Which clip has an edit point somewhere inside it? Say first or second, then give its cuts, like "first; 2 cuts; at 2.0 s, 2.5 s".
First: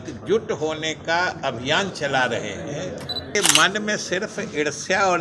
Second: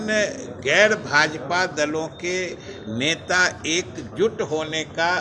first; 1 cut; at 3.4 s